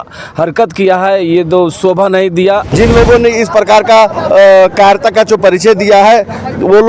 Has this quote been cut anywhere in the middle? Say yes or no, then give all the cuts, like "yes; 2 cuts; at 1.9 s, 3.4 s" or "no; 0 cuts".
yes; 1 cut; at 2.7 s